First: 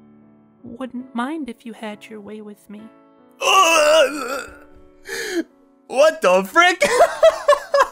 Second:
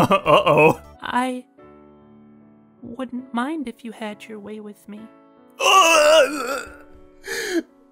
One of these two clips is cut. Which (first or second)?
second